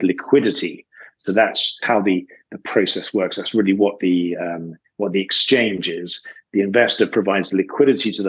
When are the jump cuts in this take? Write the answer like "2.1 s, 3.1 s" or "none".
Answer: 1.8 s